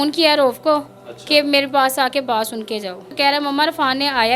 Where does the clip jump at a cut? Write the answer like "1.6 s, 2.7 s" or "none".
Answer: 3.1 s